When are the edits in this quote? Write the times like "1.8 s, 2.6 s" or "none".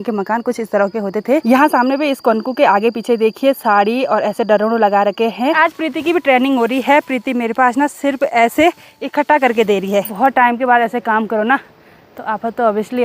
1.4 s, 5.6 s, 10.1 s